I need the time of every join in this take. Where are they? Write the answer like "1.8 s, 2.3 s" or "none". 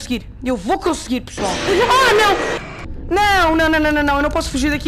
2.7 s